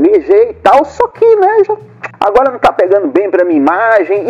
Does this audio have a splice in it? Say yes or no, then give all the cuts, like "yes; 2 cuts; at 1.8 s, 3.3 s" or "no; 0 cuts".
no; 0 cuts